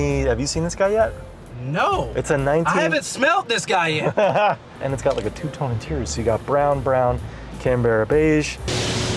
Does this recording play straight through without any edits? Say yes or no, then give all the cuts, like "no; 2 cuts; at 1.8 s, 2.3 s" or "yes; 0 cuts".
no; 1 cut; at 4.8 s